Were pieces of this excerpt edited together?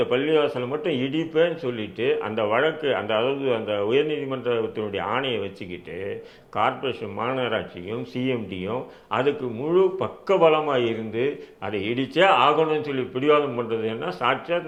no; 0 cuts

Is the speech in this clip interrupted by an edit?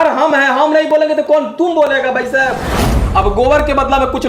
yes; 1 cut; at 2.8 s

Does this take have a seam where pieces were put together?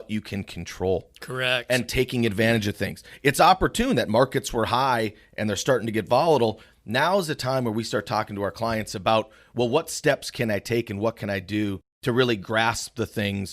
yes; 1 cut; at 11.9 s

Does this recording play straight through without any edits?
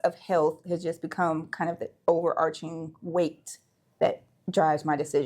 yes; 0 cuts

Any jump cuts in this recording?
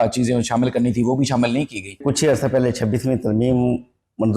yes; 1 cut; at 2.0 s

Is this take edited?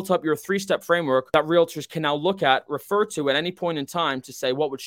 yes; 1 cut; at 1.3 s

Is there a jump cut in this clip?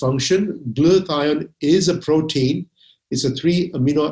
no; 0 cuts

